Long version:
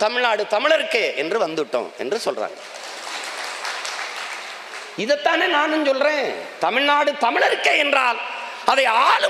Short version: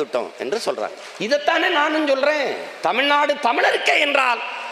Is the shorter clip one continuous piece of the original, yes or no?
no